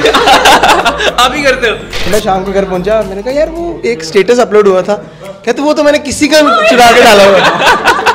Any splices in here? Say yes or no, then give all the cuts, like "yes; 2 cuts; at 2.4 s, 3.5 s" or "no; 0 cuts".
yes; 1 cut; at 2.1 s